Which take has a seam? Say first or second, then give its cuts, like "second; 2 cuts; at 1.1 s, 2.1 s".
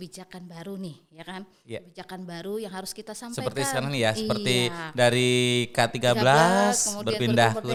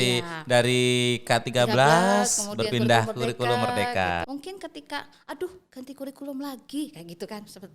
second; 1 cut; at 4.3 s